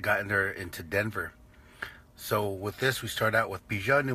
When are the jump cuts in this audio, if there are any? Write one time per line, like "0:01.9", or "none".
0:02.6